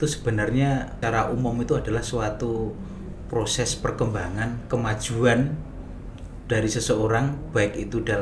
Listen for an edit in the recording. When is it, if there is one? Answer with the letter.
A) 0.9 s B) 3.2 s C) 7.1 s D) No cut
A